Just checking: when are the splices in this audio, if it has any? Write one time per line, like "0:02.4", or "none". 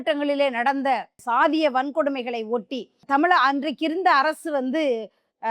0:01.1